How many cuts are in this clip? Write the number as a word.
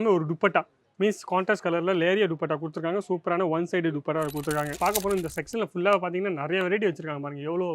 one